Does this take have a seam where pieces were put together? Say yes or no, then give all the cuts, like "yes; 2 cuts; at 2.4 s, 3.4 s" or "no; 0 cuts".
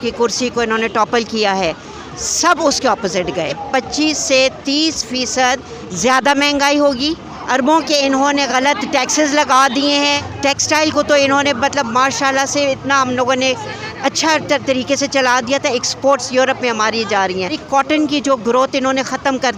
yes; 4 cuts; at 3.6 s, 7.3 s, 10.3 s, 17.6 s